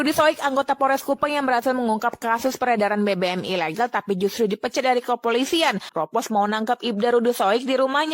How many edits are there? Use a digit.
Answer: 1